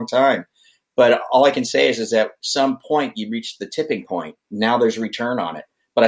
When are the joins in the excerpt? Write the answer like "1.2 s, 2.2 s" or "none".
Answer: 4.4 s